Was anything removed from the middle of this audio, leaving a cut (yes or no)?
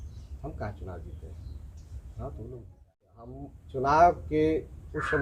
yes